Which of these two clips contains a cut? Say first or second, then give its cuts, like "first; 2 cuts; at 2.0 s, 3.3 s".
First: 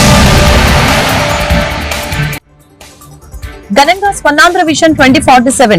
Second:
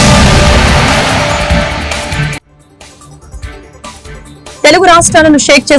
first; 1 cut; at 3.6 s